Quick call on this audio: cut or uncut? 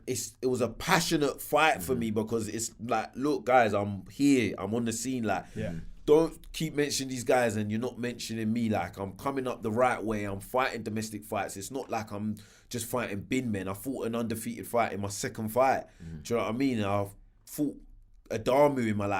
uncut